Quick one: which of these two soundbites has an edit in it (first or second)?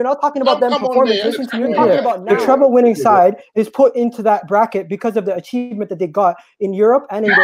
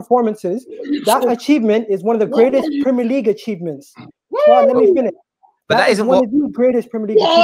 first